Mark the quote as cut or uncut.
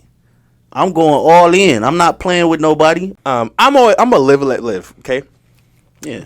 cut